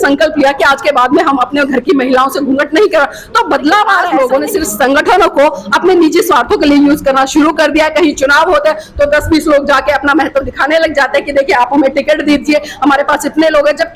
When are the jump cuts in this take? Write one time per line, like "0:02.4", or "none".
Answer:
0:04.0